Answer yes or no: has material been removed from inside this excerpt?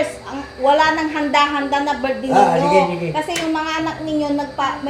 no